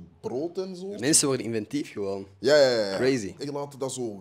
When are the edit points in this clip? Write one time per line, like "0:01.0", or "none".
0:01.0
0:03.4